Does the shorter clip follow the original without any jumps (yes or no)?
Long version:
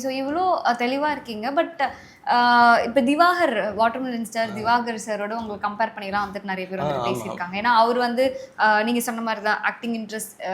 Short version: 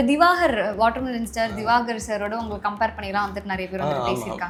yes